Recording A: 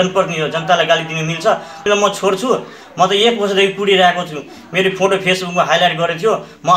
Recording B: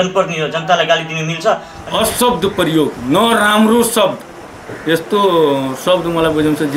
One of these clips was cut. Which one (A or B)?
B